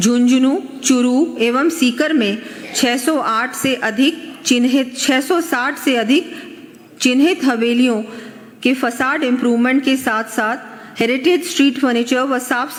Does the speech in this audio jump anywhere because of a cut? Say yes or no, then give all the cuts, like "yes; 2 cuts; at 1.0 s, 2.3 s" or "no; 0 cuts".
no; 0 cuts